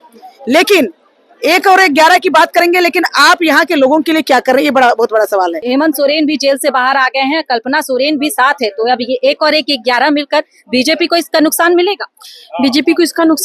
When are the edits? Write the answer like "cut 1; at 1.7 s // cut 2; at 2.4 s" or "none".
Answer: cut 1; at 5.6 s

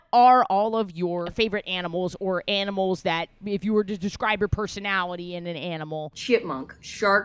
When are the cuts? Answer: cut 1; at 1.3 s // cut 2; at 3.4 s // cut 3; at 6.1 s

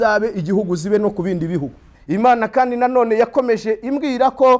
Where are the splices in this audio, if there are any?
cut 1; at 1.9 s

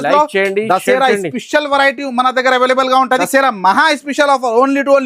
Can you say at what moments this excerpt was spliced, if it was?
cut 1; at 3.1 s

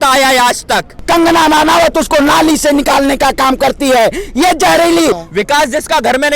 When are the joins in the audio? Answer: cut 1; at 1.0 s // cut 2; at 5.2 s

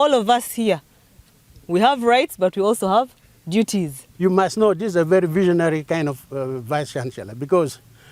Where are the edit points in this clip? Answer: cut 1; at 4.0 s

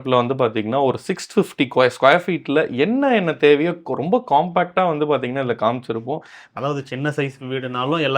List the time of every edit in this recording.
cut 1; at 6.4 s

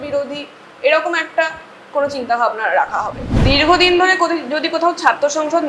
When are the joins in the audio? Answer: cut 1; at 3.4 s

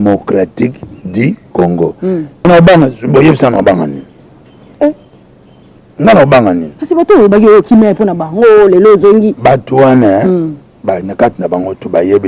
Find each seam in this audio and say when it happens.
cut 1; at 2.4 s

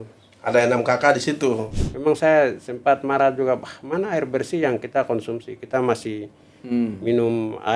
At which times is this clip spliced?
cut 1; at 1.7 s

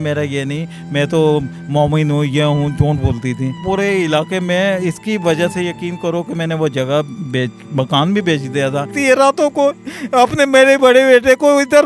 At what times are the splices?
cut 1; at 3.6 s // cut 2; at 9.0 s

